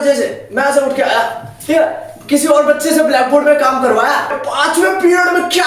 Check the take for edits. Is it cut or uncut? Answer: cut